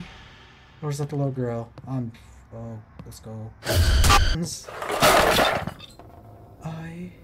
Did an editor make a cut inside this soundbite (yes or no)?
yes